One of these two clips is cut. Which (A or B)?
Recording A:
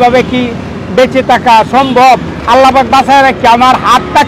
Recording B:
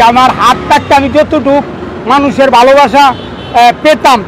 A